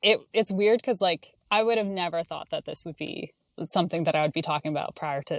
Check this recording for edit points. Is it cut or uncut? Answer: cut